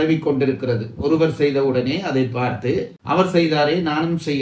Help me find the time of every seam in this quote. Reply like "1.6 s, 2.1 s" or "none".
none